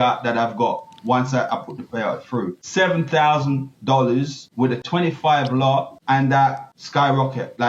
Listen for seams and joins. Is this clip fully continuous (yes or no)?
no